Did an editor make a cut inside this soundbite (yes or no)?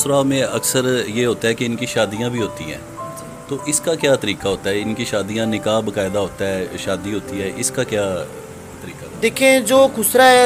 no